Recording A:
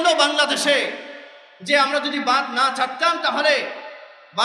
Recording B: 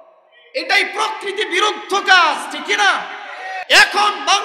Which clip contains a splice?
B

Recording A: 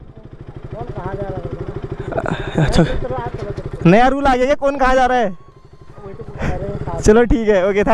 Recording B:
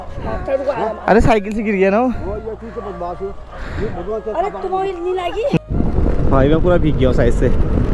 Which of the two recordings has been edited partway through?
B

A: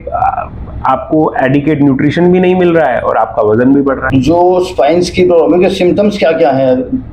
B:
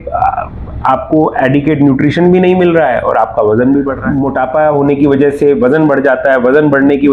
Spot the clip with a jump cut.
B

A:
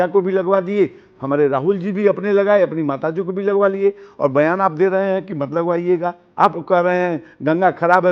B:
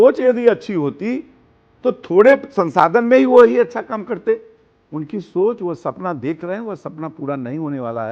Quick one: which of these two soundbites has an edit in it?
A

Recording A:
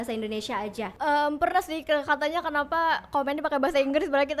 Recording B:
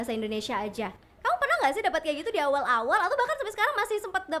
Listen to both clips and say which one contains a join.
A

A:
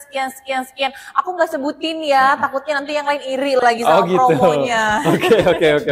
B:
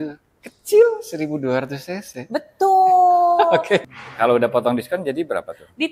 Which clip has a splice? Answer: B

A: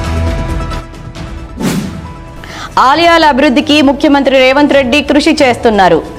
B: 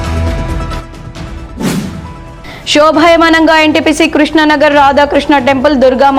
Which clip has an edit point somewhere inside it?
A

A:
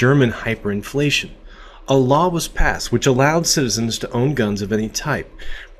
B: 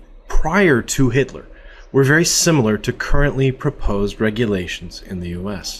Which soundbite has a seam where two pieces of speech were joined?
B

